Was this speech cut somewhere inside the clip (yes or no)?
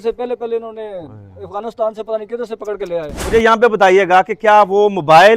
yes